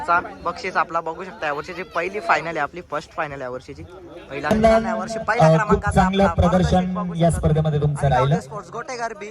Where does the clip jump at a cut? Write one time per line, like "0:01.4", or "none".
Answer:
0:04.5

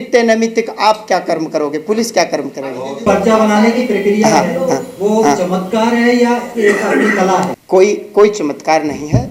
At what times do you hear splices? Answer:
0:03.1
0:07.6

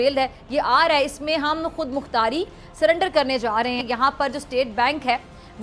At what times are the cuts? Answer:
0:03.8

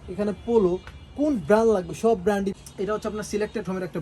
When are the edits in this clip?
0:02.5

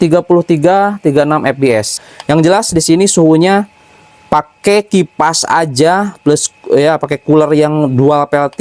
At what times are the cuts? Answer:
0:01.9

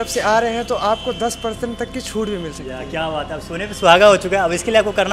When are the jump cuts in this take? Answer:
none

